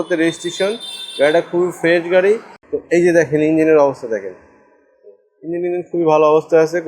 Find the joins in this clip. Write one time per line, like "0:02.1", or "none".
0:02.5